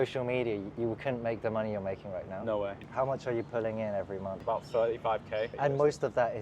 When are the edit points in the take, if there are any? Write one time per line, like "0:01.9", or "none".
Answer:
0:02.8
0:04.3
0:05.5